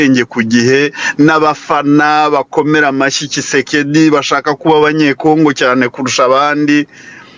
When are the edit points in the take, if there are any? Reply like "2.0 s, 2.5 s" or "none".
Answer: none

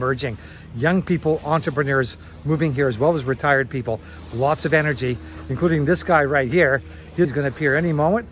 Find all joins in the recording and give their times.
7.3 s

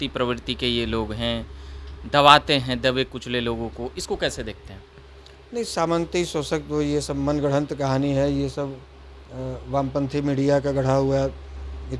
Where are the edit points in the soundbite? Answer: none

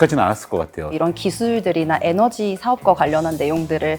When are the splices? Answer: 1.0 s

